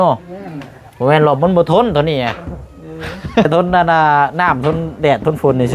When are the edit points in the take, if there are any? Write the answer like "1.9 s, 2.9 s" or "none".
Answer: 3.5 s